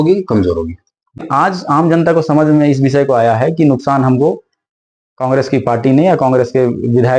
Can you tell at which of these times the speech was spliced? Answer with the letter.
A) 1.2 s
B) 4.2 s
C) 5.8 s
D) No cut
A